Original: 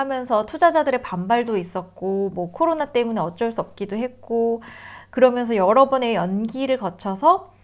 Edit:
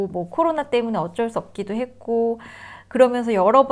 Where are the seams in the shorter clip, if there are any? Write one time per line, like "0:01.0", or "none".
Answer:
none